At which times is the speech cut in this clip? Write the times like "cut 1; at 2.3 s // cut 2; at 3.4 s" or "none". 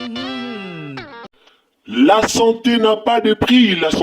cut 1; at 1.1 s